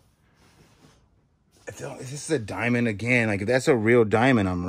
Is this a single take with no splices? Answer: yes; 0 cuts

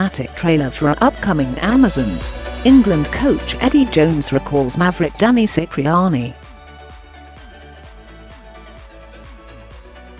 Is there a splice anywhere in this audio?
no; 0 cuts

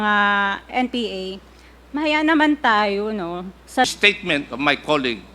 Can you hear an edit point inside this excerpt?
yes; 1 cut; at 3.9 s

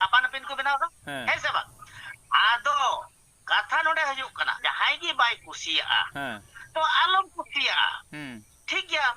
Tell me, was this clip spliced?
yes; 1 cut; at 4.6 s

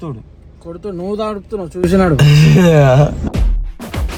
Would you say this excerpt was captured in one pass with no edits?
yes; 0 cuts

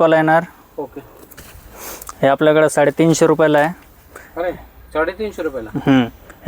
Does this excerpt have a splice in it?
no; 0 cuts

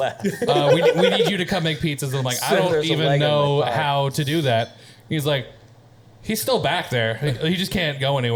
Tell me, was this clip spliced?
no; 0 cuts

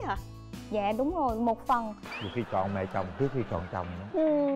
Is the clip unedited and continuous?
no; 1 cut; at 2.1 s

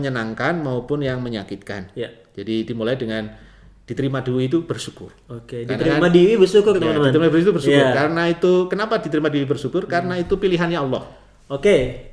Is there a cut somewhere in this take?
no; 0 cuts

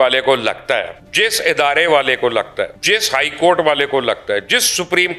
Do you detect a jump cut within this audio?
yes; 2 cuts; at 1.0 s, 2.8 s

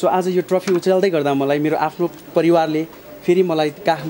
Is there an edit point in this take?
no; 0 cuts

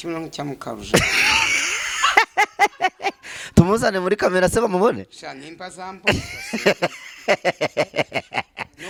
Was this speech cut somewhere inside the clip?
no; 0 cuts

